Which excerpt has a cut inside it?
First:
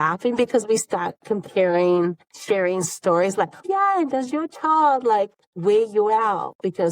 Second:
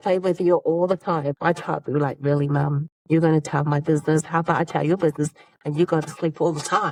first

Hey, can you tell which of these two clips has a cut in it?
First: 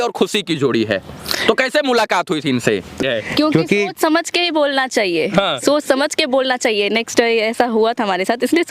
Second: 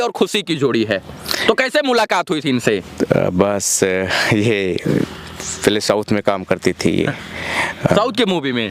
first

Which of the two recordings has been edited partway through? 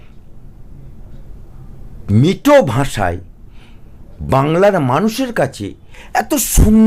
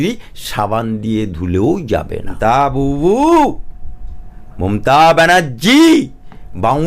second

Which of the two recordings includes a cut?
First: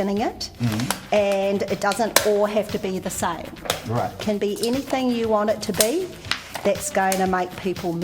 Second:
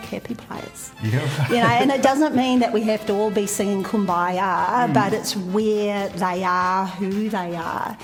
first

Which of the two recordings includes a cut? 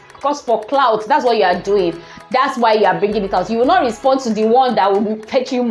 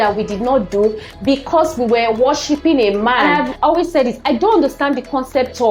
second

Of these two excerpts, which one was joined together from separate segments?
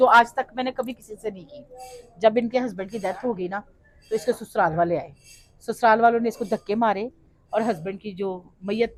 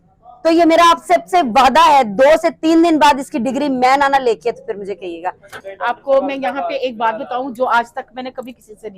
second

